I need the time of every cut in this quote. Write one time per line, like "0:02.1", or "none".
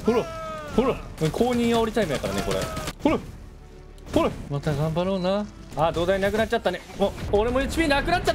0:01.1
0:02.9
0:04.4
0:05.6
0:07.2